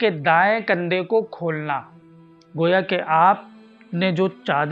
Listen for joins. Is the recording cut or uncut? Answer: uncut